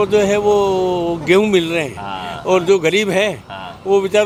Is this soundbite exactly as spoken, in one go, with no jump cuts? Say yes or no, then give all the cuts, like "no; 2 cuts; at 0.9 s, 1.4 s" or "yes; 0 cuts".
yes; 0 cuts